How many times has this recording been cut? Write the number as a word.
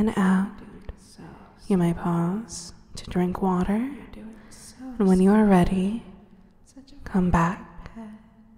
one